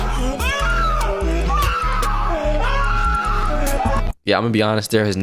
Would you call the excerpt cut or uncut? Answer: uncut